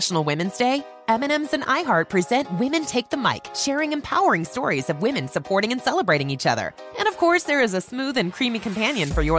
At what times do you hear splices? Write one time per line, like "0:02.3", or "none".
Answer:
none